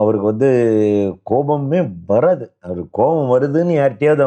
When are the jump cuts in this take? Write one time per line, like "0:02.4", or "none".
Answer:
none